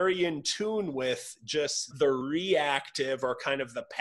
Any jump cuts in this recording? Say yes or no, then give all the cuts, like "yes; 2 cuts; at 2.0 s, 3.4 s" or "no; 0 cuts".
yes; 1 cut; at 2.1 s